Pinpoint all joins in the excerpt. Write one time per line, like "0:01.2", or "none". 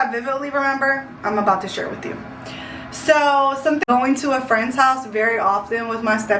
0:03.9